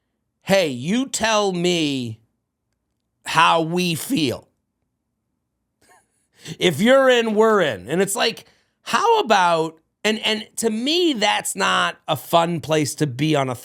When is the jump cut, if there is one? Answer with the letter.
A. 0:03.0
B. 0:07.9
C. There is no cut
C